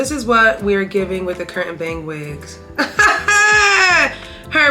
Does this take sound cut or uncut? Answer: uncut